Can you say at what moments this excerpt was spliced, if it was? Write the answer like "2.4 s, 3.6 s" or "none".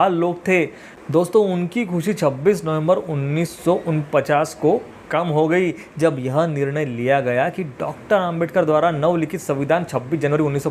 1.0 s